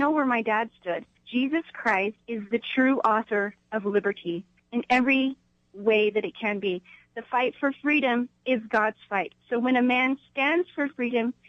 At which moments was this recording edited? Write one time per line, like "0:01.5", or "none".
0:01.2
0:02.2
0:04.5
0:06.9